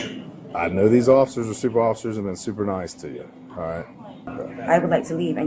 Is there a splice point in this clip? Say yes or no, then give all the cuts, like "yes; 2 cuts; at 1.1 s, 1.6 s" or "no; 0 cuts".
yes; 1 cut; at 4.2 s